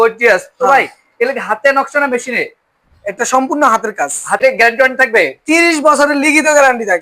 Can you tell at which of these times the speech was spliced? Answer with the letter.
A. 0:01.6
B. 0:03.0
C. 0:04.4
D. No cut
C